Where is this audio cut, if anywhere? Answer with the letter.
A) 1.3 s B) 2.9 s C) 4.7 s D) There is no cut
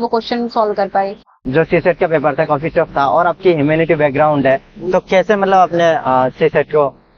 D